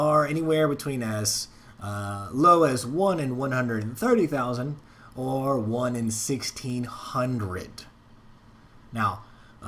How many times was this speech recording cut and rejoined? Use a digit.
1